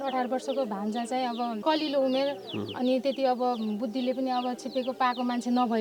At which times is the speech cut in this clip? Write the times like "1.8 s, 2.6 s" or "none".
1.6 s